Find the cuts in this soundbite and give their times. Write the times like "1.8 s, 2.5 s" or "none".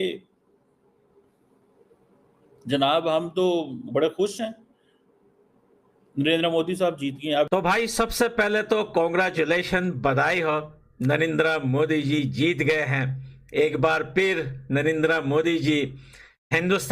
7.5 s